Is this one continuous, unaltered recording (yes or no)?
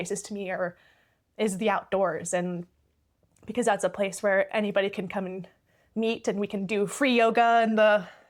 yes